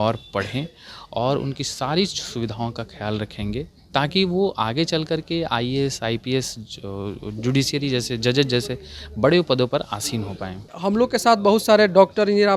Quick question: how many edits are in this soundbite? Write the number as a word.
one